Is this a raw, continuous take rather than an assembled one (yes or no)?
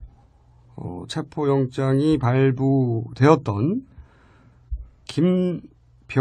no